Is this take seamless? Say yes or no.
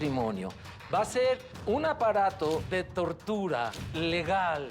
no